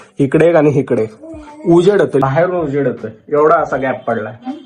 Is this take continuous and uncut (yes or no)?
no